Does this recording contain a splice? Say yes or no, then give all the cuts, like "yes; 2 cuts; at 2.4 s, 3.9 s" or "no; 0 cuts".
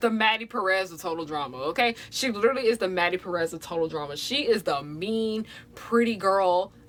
no; 0 cuts